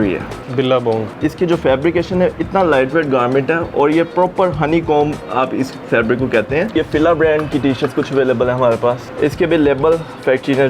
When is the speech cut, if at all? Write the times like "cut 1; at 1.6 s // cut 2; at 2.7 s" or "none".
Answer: cut 1; at 0.9 s // cut 2; at 6.7 s // cut 3; at 9.1 s